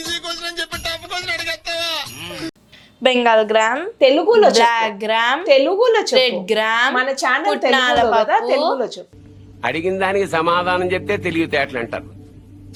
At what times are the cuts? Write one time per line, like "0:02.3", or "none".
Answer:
none